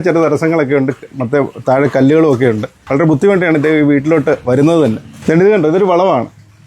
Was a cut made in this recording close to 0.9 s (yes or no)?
no